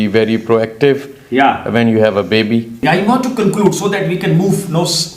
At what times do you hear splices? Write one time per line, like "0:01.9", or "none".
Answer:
0:02.7